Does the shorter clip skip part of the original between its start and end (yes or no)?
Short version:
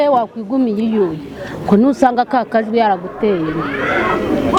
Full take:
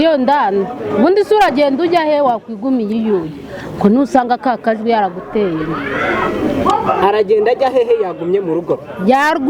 no